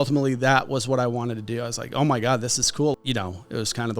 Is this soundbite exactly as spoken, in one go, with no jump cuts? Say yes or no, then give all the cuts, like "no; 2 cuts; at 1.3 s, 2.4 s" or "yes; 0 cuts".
no; 1 cut; at 2.9 s